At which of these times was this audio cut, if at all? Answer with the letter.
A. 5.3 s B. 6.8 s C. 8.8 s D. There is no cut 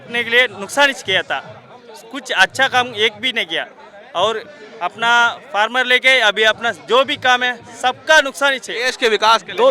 C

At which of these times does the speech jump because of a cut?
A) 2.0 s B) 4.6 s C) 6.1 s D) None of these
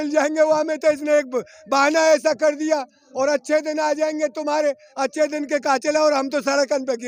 D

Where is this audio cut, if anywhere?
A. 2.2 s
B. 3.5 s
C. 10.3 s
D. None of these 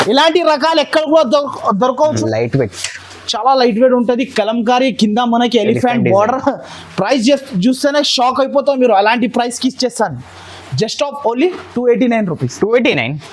A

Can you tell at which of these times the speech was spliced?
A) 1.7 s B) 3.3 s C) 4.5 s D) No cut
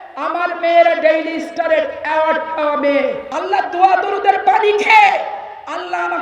B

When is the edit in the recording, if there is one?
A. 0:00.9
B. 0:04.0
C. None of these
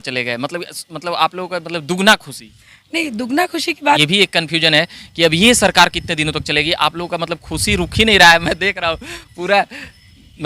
B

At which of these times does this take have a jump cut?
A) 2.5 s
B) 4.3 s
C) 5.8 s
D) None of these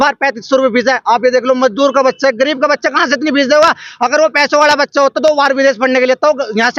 D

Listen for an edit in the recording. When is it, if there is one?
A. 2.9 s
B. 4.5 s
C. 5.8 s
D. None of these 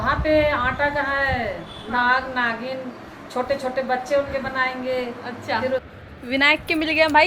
C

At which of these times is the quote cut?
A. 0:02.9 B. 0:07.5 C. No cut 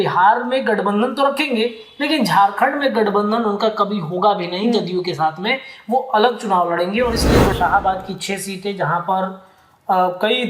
B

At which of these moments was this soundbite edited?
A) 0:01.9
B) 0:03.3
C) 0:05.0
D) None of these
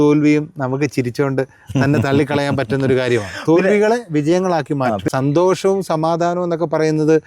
C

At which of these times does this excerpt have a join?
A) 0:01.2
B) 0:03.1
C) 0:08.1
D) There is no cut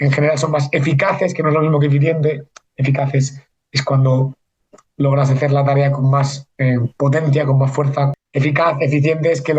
C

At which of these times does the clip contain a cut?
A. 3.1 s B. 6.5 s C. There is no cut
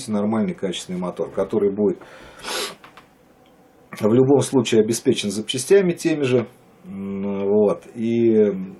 C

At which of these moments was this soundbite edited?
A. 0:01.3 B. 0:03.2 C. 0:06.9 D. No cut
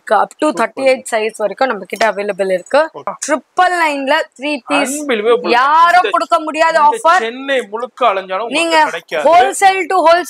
B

